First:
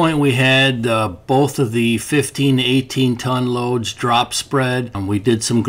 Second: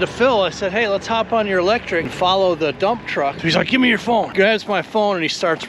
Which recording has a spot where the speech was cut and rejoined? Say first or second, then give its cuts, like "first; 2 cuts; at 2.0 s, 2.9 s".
second; 3 cuts; at 2.1 s, 3.4 s, 4.3 s